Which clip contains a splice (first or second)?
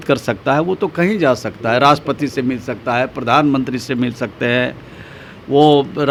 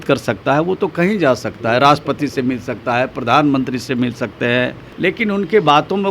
second